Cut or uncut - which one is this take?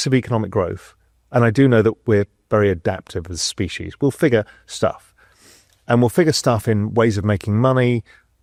uncut